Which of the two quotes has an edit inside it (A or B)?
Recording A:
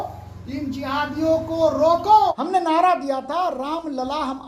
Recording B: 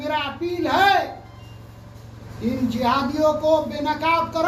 A